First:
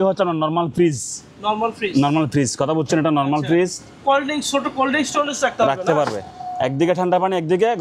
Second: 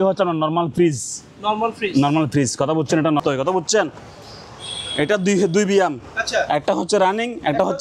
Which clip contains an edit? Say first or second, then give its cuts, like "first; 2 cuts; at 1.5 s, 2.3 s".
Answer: second; 1 cut; at 3.2 s